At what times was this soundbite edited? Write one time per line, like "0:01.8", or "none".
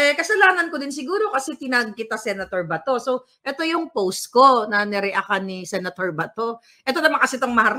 none